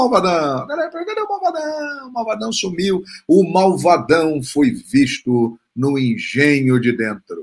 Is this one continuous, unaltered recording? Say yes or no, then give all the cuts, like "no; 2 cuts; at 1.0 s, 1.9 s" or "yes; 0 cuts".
yes; 0 cuts